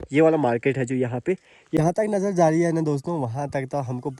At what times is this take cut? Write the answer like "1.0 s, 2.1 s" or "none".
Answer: 1.6 s